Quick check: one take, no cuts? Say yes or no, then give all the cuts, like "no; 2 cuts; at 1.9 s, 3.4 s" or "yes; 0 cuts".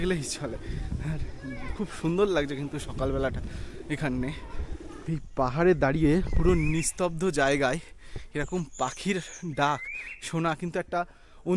no; 1 cut; at 4.9 s